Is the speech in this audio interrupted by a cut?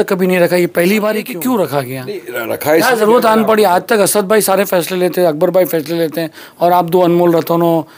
yes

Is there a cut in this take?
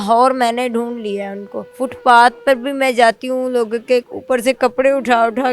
yes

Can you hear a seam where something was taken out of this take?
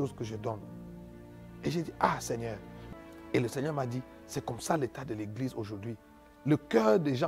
yes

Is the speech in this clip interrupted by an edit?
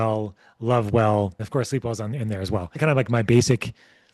yes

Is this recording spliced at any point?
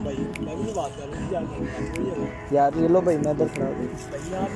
no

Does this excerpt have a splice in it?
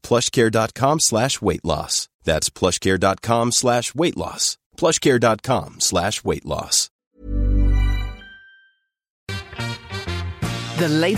yes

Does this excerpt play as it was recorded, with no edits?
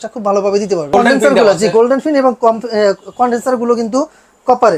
no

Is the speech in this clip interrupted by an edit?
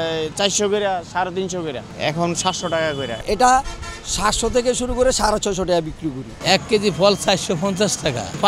yes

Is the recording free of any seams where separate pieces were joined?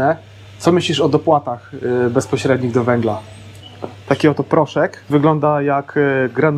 no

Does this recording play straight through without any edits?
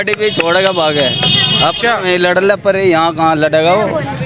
yes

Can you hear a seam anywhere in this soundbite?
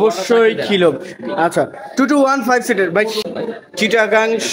yes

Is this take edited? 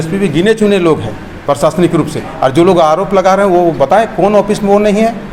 no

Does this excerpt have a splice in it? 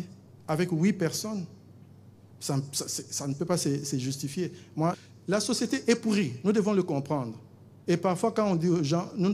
yes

